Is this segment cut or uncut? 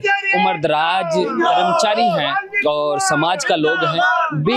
uncut